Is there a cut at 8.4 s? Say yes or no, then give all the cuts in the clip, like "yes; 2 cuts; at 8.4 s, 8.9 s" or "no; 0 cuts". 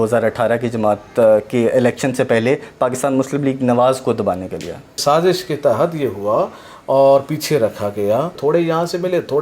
yes; 2 cuts; at 5.0 s, 8.4 s